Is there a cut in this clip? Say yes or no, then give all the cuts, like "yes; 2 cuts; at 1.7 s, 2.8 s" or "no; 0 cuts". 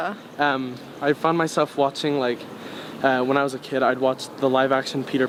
no; 0 cuts